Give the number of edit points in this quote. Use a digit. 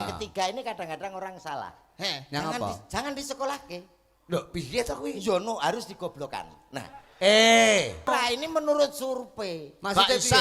1